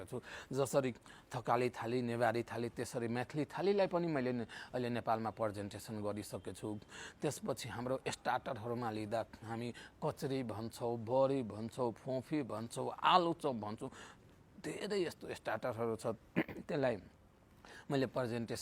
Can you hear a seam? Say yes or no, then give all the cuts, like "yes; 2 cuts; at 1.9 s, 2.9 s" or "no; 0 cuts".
no; 0 cuts